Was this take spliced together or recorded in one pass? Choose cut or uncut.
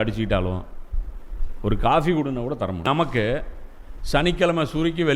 cut